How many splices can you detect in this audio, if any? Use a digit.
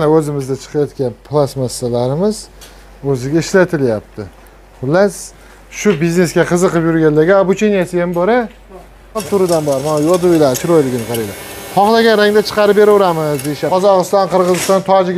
2